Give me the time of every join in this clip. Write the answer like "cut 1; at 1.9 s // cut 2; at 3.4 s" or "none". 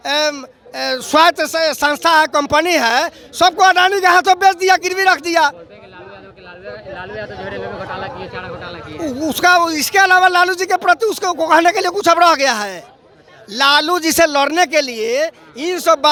none